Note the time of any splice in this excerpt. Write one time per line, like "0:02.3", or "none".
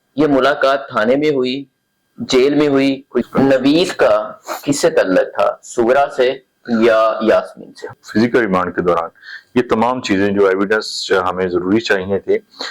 0:03.3
0:07.9